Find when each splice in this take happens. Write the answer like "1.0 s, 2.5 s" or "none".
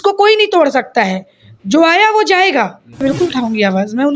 3.0 s